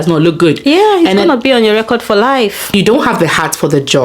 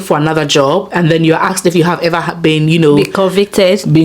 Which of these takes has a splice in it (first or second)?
first